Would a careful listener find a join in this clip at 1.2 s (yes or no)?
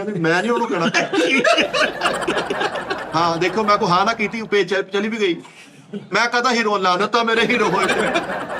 no